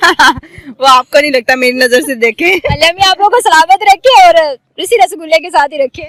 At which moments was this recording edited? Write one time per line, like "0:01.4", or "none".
none